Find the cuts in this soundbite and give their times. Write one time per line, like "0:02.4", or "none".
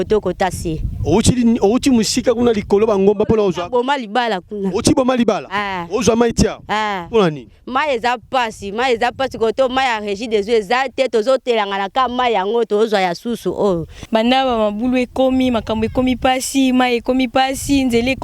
0:13.9